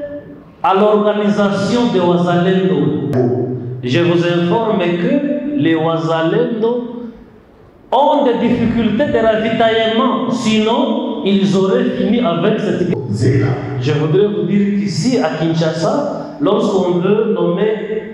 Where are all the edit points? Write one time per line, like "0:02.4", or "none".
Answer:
0:03.1
0:12.9